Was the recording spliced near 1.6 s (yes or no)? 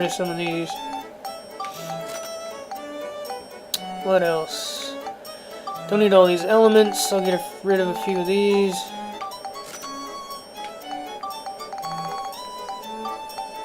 no